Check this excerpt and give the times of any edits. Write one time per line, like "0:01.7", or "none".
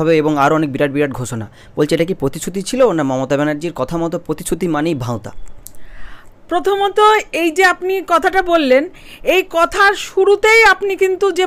none